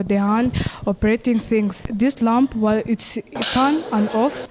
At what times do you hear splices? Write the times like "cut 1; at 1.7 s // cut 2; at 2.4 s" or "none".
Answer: cut 1; at 1.8 s